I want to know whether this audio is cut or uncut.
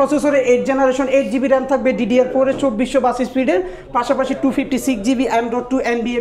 uncut